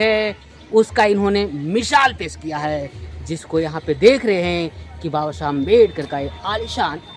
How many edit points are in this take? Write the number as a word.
zero